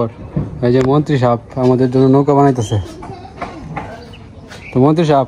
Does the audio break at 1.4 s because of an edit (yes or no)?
no